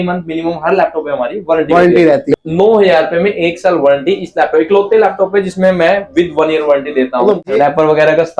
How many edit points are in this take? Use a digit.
2